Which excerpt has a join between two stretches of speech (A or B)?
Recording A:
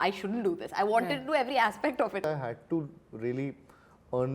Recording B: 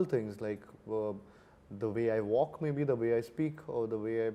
A